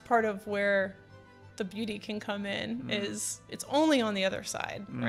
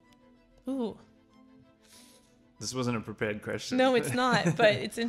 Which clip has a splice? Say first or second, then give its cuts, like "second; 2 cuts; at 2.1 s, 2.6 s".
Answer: first; 1 cut; at 3.5 s